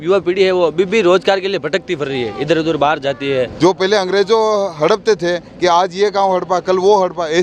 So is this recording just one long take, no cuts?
no; 1 cut; at 3.5 s

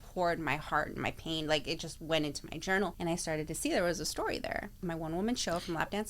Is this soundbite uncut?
no; 2 cuts; at 2.9 s, 4.8 s

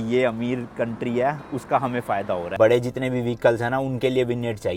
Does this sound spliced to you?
no; 0 cuts

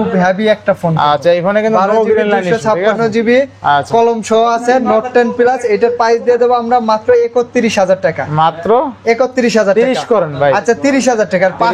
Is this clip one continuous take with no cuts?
yes; 0 cuts

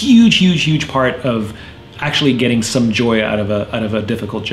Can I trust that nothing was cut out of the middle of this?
yes; 0 cuts

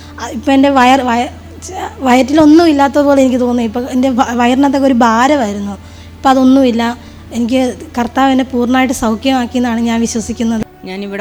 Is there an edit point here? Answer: no; 0 cuts

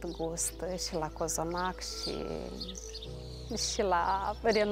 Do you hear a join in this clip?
no; 0 cuts

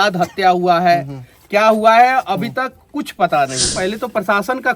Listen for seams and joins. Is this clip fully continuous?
no; 1 cut; at 3.7 s

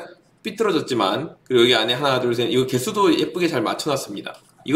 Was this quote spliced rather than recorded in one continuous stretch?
no; 0 cuts

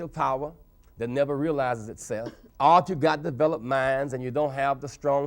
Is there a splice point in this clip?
yes; 1 cut; at 2.4 s

